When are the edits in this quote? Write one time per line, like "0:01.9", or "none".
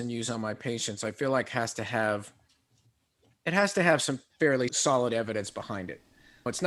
none